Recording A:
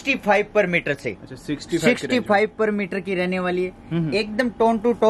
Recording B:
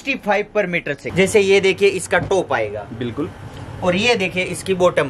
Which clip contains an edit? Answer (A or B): B